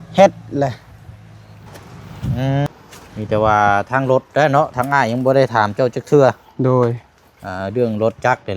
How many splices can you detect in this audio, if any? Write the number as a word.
one